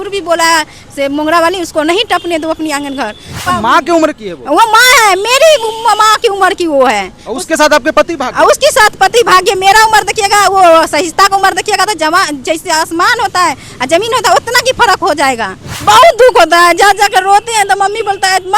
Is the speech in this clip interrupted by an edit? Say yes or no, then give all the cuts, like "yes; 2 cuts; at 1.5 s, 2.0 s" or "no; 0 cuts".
yes; 2 cuts; at 3.4 s, 15.7 s